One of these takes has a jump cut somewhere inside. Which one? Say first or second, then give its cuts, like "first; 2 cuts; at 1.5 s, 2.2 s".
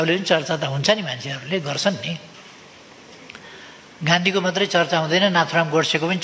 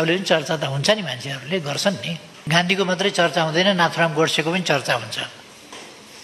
second; 1 cut; at 2.3 s